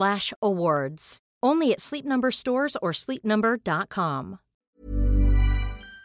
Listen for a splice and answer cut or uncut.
cut